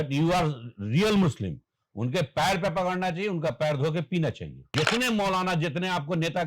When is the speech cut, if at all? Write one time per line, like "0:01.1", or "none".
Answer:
0:04.7